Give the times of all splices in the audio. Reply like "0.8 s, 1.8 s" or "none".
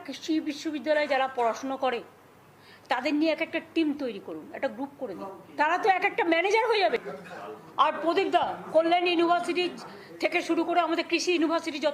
5.3 s, 7.2 s